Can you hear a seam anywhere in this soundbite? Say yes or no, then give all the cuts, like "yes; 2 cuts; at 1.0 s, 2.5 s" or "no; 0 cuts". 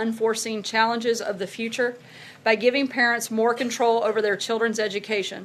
yes; 1 cut; at 1.4 s